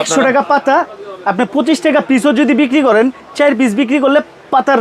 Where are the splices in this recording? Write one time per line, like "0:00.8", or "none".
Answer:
none